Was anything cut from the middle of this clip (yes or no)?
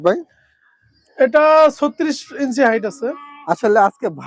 no